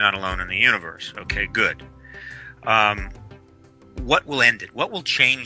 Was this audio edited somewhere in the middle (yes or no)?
yes